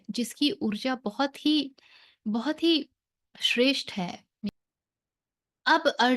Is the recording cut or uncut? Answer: cut